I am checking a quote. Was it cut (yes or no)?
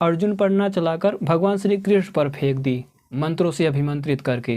yes